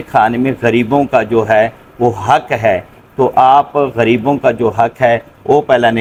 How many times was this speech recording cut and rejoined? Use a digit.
0